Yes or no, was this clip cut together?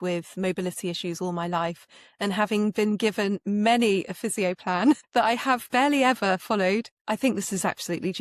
no